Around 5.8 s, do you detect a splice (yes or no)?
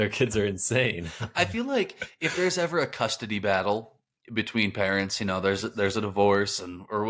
no